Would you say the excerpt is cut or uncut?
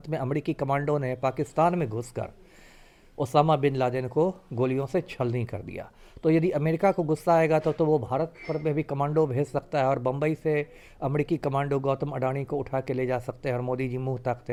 uncut